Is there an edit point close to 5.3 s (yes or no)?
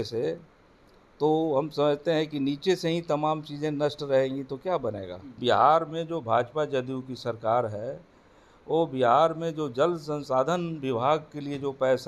yes